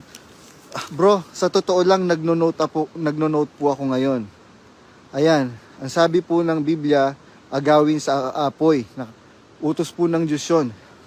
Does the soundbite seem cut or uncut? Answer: uncut